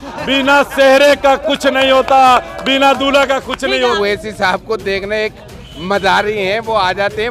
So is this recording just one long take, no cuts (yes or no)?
no